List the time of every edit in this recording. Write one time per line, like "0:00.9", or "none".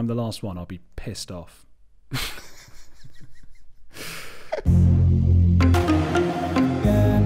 none